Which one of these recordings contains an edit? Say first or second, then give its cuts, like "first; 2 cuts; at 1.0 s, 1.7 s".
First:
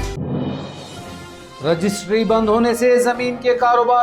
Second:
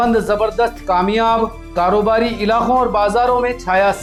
first; 1 cut; at 1.4 s